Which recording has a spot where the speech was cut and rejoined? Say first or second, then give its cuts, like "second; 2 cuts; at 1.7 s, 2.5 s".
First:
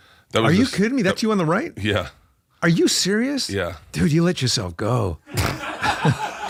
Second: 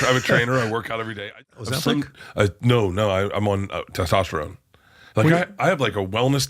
second; 1 cut; at 1.3 s